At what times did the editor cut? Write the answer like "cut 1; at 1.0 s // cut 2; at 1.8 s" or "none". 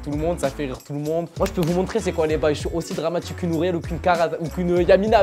cut 1; at 1.3 s